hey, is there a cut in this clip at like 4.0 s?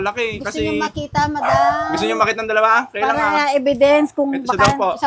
no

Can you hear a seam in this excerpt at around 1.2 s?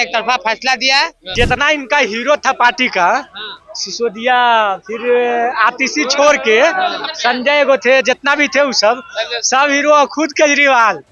yes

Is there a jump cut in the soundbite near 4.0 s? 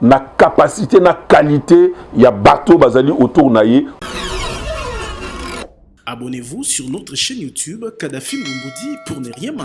yes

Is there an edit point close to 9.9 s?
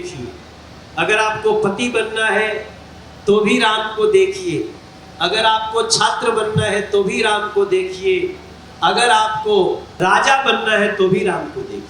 yes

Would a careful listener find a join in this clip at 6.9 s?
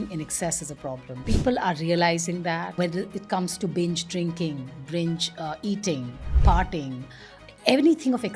no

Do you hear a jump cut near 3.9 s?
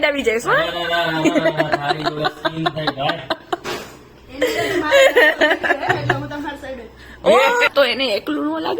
no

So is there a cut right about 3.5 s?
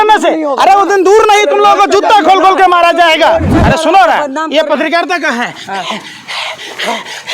yes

